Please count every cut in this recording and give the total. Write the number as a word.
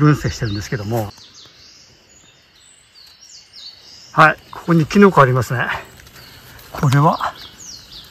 one